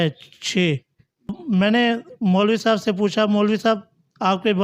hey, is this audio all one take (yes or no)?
no